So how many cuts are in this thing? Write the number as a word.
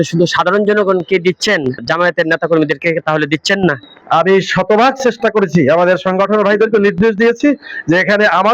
two